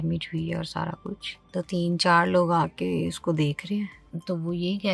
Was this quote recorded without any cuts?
yes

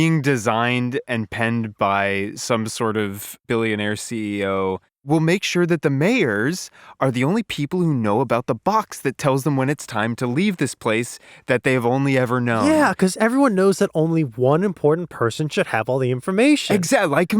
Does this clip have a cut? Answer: yes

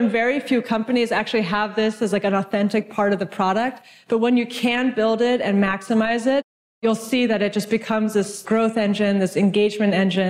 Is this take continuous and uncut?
no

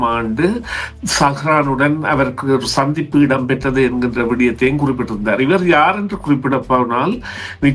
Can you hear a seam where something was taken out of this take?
no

